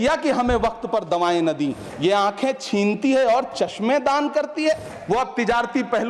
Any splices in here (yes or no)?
yes